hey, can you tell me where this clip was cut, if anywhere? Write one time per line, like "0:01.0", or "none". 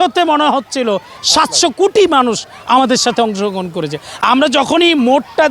none